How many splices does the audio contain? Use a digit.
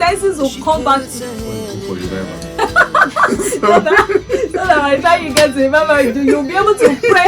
1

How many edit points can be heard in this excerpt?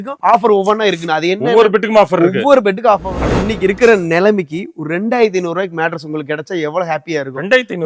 1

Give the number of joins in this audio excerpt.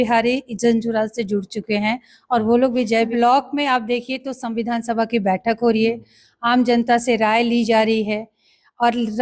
1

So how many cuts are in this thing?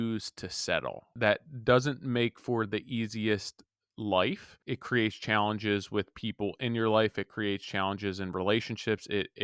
2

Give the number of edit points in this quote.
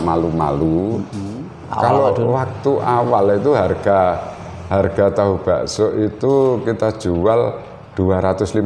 1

